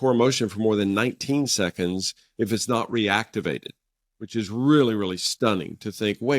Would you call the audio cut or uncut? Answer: uncut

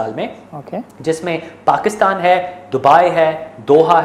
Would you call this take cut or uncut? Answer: uncut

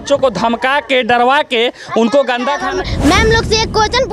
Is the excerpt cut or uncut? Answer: cut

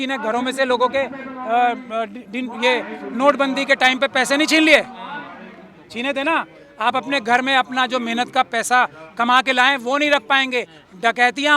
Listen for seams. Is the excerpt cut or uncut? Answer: uncut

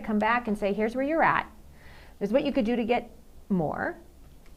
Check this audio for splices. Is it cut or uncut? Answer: uncut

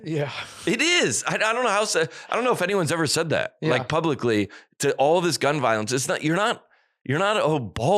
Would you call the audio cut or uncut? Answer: uncut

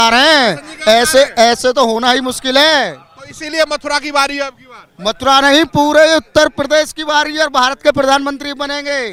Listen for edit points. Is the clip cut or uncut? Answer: uncut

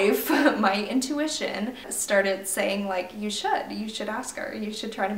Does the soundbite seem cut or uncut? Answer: cut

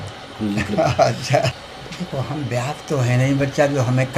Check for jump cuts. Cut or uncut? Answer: uncut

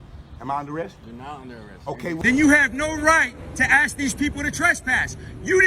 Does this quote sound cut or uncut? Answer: cut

